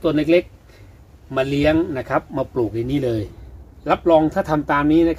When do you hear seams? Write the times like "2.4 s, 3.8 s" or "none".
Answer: 3.4 s